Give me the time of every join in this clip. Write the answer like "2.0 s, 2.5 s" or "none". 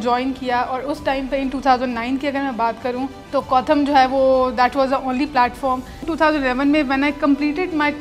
3.2 s, 6.1 s